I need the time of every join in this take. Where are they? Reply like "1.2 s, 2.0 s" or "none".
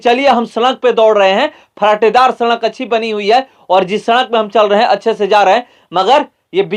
none